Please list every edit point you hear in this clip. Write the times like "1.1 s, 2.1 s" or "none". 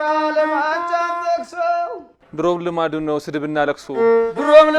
none